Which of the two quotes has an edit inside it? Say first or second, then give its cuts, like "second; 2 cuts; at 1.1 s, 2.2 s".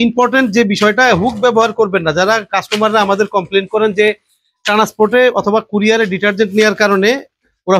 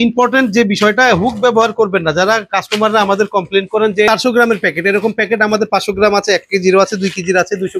second; 1 cut; at 4.1 s